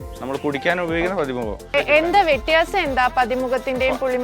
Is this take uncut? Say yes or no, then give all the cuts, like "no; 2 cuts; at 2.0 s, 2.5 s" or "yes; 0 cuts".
no; 1 cut; at 1.7 s